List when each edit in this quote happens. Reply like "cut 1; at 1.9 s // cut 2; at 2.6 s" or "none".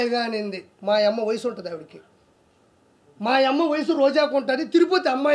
none